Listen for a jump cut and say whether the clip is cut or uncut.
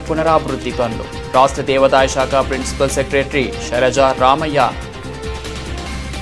cut